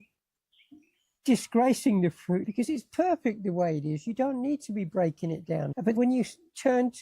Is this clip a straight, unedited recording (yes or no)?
no